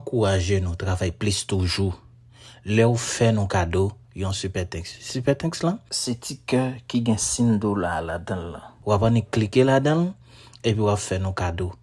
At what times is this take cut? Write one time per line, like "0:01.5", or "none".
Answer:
none